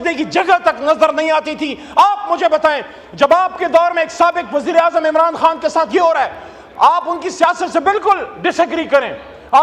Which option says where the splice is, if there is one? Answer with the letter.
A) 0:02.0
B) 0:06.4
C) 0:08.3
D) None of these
D